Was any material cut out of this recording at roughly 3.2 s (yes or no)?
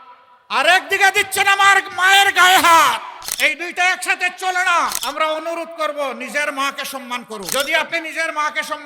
yes